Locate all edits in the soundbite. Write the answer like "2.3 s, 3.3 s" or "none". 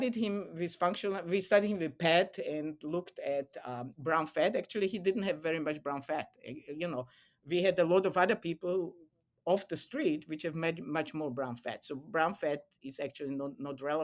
none